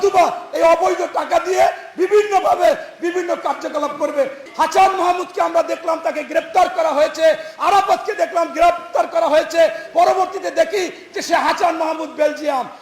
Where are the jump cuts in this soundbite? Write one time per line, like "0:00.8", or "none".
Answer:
0:04.4